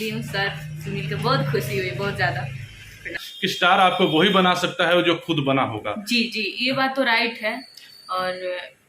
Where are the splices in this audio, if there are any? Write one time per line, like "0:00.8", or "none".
0:03.2

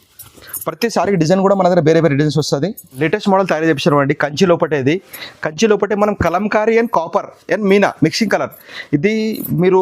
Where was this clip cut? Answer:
0:02.8

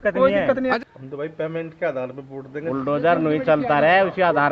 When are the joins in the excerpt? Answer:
0:00.7
0:02.5

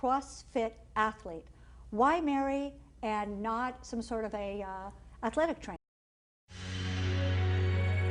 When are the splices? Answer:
none

